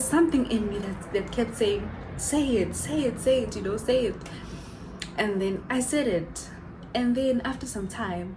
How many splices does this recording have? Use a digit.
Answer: 0